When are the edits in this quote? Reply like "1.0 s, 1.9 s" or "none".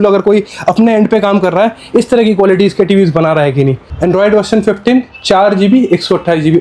3.8 s